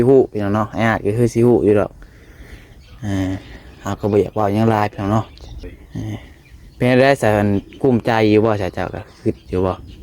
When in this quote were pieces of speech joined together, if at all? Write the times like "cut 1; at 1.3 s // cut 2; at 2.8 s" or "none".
cut 1; at 5.8 s